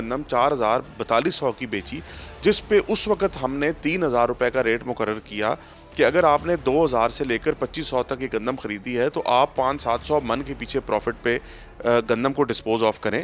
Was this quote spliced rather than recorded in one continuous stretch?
no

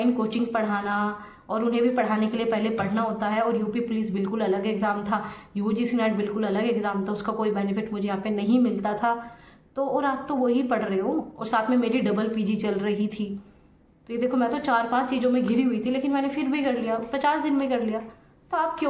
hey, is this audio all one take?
yes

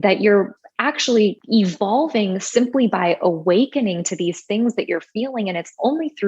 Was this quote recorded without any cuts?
no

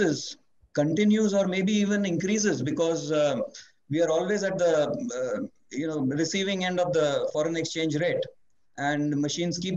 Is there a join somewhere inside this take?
no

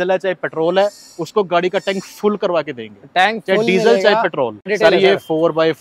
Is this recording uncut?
no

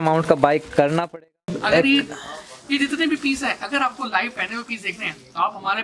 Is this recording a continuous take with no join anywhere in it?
no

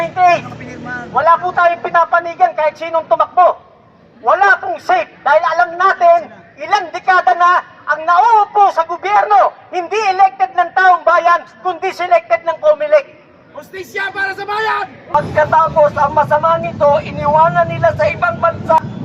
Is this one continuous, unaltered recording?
no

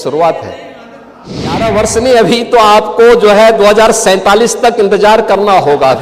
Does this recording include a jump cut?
yes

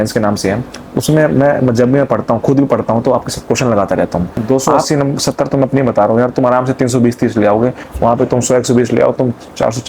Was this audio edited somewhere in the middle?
yes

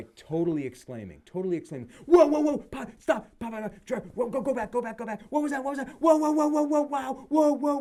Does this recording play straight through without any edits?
yes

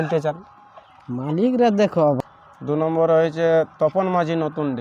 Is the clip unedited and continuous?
no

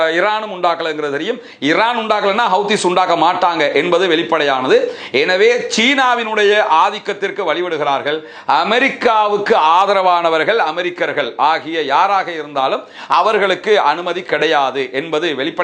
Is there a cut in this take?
no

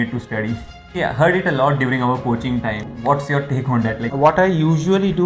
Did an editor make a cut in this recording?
yes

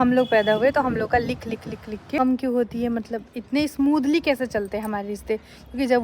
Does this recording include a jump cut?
yes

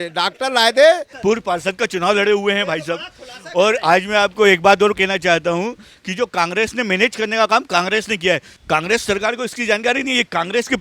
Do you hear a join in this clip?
yes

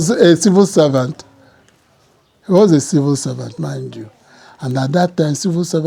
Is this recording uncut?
yes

